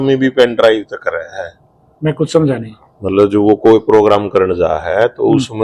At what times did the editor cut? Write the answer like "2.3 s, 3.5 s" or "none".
none

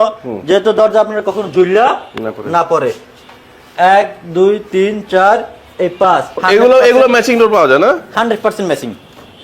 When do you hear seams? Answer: 6.4 s

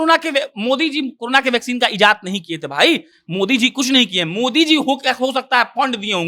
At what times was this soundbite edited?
none

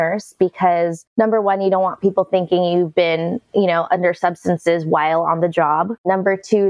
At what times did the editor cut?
none

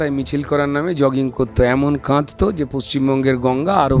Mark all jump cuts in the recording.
none

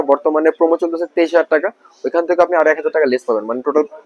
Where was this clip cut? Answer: none

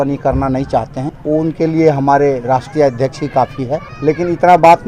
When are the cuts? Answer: 1.1 s, 3.9 s

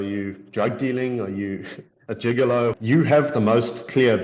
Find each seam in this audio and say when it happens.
2.8 s

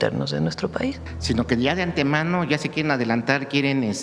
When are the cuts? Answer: 1.1 s

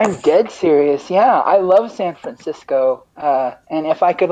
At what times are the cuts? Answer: 3.1 s

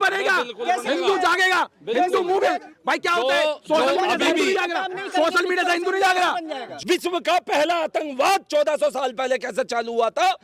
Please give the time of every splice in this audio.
6.6 s

